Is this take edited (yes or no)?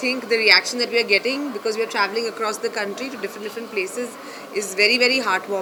no